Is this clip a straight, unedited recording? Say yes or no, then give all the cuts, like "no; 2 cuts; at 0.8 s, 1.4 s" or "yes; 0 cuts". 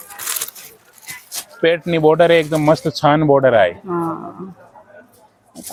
yes; 0 cuts